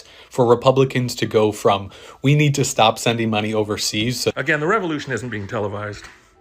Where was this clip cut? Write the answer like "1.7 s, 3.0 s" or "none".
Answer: 4.3 s